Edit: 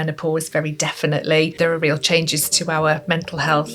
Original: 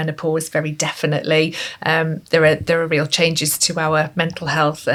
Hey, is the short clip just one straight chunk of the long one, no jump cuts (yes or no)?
no